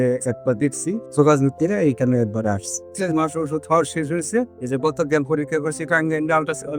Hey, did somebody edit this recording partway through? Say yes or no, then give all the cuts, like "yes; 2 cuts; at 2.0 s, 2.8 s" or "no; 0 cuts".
yes; 2 cuts; at 1.0 s, 2.9 s